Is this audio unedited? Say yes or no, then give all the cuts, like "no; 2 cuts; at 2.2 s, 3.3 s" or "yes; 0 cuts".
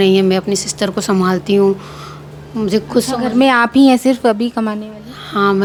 yes; 0 cuts